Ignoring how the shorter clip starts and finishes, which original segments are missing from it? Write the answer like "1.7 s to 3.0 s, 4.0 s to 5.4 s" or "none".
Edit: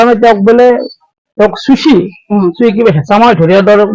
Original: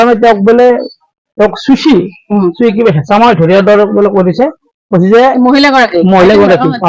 none